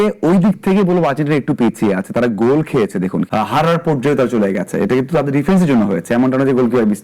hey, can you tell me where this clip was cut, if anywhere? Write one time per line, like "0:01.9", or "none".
0:03.2